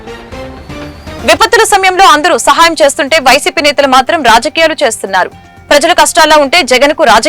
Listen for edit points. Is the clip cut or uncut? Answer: cut